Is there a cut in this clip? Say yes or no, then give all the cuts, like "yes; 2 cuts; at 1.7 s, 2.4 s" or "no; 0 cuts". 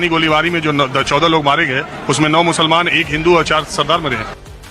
no; 0 cuts